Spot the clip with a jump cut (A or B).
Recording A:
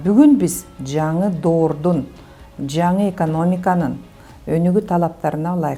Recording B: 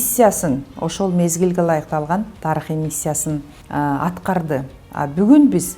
B